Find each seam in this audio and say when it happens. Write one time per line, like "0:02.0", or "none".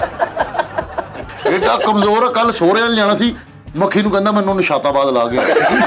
0:01.2